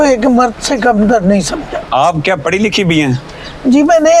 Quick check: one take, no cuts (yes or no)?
no